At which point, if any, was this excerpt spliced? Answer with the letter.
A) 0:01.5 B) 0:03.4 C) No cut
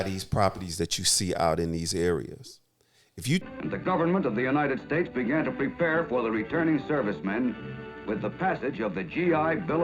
B